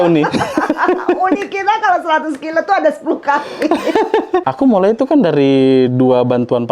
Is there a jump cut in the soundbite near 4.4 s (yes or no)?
yes